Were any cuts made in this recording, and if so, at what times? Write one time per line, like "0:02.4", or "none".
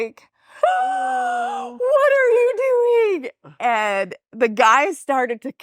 none